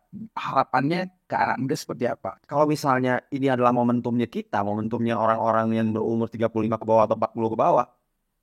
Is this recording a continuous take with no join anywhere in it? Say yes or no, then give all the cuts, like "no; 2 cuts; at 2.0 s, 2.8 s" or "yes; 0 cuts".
no; 1 cut; at 2.3 s